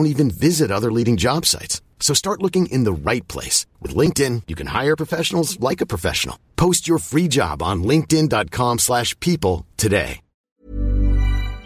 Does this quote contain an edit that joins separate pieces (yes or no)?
yes